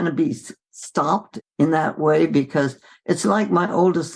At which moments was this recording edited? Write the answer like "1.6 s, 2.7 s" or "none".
1.3 s